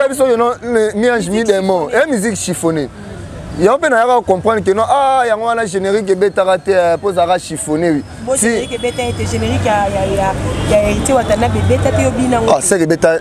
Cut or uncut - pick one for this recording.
uncut